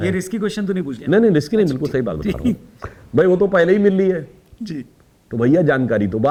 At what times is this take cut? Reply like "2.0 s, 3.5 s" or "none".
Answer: none